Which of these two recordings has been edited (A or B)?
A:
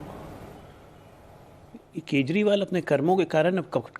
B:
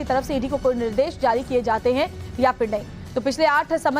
B